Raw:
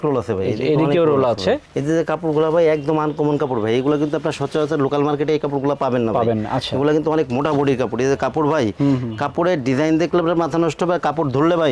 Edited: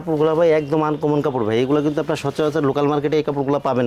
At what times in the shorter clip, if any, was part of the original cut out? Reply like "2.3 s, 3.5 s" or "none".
none